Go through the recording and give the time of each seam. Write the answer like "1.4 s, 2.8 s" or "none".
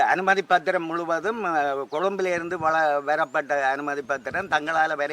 none